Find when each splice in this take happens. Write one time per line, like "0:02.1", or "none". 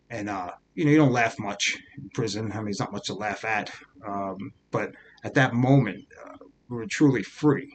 none